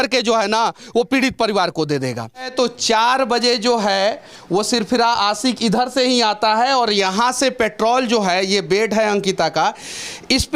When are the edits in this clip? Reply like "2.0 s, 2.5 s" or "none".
2.5 s